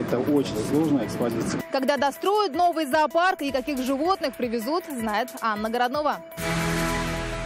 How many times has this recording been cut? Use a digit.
1